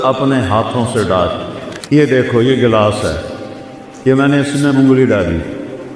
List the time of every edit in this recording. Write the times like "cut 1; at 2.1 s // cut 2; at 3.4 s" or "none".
cut 1; at 1.6 s